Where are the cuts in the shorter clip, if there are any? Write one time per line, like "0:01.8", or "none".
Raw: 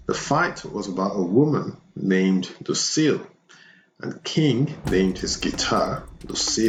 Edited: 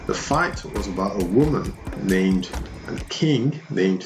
0:02.5